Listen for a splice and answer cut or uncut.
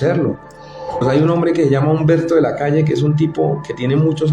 cut